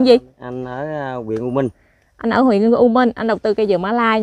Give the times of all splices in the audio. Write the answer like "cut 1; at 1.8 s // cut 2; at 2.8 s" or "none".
none